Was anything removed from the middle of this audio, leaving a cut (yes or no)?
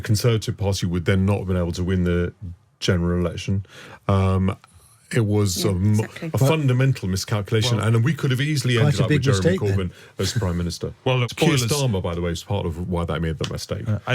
yes